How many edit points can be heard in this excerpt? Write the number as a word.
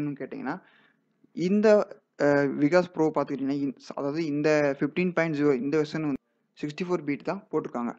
one